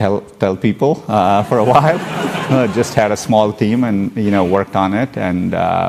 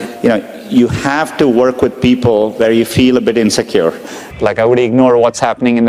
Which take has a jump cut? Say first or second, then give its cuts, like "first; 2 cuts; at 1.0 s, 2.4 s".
second; 1 cut; at 4.2 s